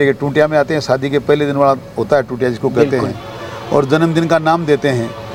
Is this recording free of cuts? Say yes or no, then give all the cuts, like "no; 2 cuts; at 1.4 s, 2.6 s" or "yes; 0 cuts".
yes; 0 cuts